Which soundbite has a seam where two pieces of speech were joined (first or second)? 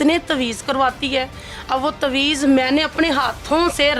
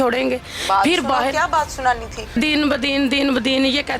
second